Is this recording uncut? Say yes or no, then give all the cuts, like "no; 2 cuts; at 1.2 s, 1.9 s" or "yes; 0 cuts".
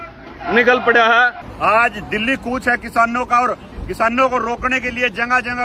no; 1 cut; at 1.4 s